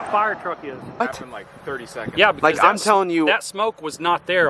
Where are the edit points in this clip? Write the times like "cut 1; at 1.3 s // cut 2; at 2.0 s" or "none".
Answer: cut 1; at 1.0 s